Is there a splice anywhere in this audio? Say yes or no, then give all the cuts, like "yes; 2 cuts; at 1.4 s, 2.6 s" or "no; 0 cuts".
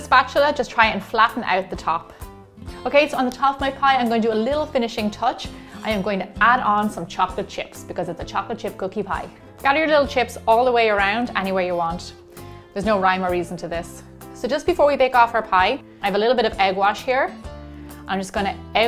no; 0 cuts